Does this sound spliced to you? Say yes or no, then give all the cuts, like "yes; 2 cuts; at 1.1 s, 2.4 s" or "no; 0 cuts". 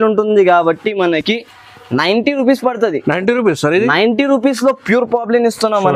no; 0 cuts